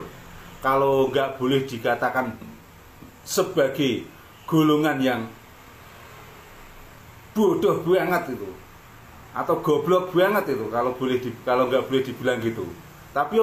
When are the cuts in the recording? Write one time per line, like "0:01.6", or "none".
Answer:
none